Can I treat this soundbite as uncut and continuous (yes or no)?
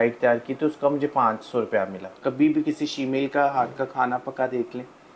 no